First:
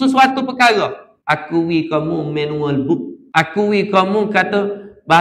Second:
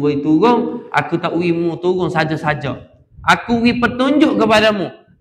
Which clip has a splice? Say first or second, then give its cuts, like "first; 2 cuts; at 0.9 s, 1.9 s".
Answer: first; 2 cuts; at 1.1 s, 3.2 s